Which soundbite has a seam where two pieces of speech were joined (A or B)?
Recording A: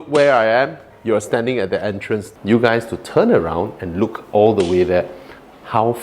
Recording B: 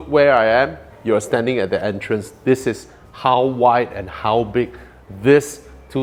A